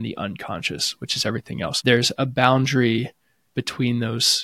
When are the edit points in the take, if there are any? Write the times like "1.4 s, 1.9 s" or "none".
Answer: 1.8 s